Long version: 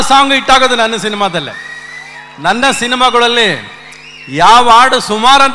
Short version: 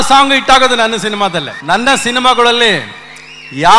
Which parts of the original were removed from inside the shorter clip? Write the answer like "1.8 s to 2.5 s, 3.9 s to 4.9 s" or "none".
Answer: 1.5 s to 2.3 s